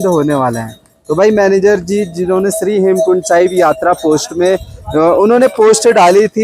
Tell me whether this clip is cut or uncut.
uncut